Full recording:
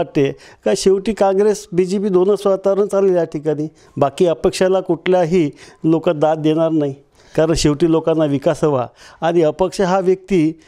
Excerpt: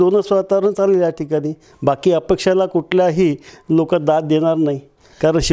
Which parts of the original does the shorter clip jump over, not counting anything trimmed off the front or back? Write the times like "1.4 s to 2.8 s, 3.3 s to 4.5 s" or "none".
none

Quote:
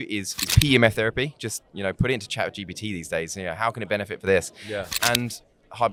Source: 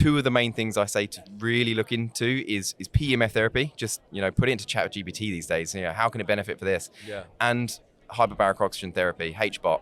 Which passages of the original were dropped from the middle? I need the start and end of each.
none

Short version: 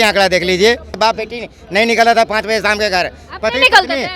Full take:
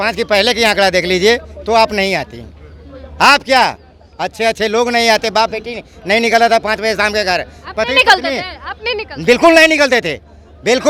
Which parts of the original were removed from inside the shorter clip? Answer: 1.5 s to 5.3 s

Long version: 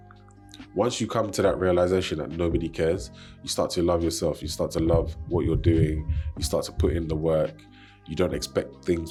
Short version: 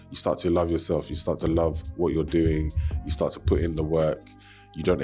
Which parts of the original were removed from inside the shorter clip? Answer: none

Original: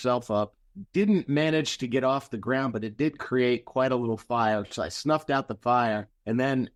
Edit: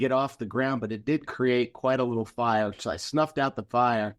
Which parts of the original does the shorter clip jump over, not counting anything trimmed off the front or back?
none

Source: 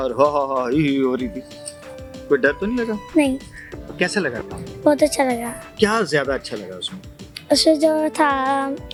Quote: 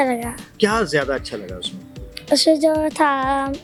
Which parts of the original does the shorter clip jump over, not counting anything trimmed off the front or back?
none

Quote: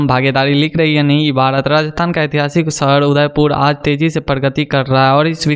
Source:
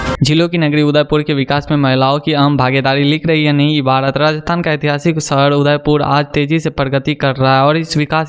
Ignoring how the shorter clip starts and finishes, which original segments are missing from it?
none

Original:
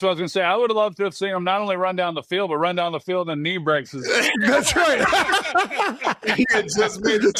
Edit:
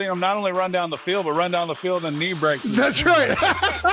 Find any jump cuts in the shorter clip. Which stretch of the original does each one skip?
3.9 s to 4.3 s

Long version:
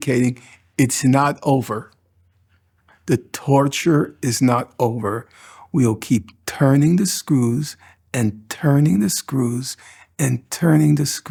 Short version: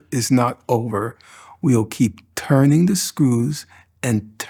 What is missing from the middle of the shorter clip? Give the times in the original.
none

